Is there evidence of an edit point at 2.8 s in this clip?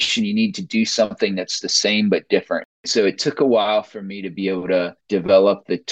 yes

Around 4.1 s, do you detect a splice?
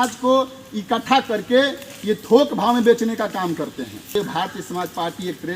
yes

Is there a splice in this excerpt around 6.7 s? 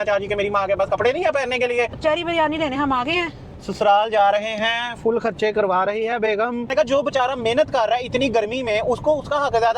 yes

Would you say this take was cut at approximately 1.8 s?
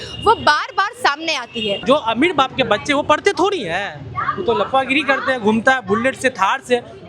yes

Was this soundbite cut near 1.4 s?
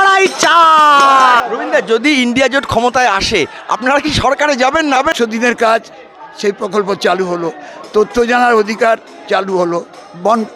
yes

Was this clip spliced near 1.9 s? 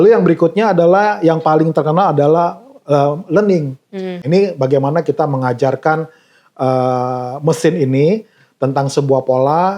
no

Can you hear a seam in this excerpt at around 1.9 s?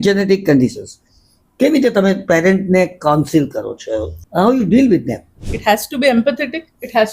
no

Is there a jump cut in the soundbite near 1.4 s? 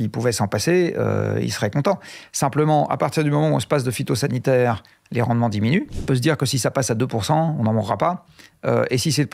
no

